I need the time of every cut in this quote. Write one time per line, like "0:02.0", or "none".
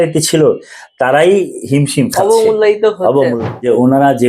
0:03.3